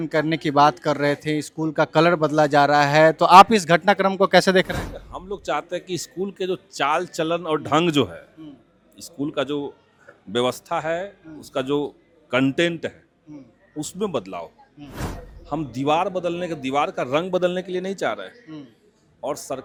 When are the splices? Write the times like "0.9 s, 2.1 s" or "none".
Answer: none